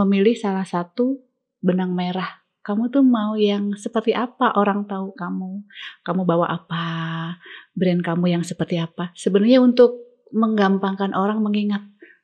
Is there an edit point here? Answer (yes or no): no